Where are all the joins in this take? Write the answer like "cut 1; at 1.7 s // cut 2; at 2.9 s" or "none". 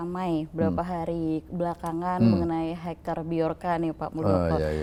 none